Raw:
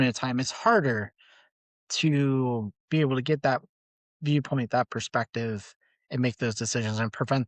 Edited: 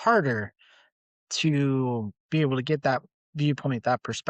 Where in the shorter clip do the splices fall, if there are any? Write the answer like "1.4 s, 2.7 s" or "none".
3.2 s